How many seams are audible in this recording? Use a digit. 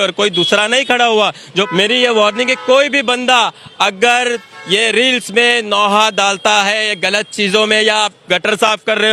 1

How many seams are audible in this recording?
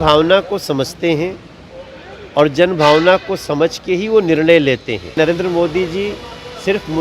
1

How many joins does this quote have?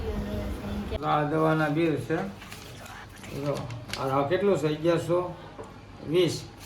1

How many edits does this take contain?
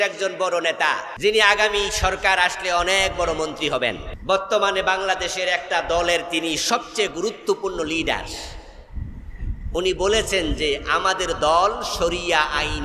2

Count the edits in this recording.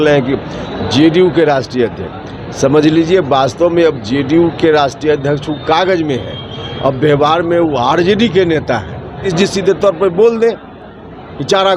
1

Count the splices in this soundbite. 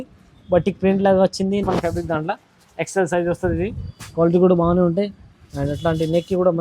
1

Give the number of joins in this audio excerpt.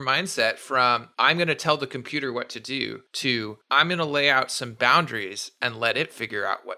2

